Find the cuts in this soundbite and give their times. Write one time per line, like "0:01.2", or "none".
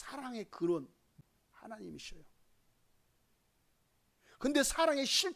0:01.2